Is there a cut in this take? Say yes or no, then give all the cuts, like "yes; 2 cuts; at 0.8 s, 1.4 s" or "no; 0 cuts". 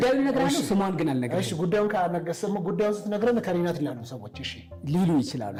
no; 0 cuts